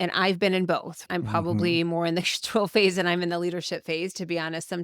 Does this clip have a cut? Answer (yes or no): yes